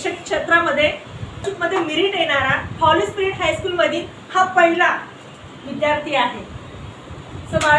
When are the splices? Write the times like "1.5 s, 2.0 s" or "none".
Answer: 1.5 s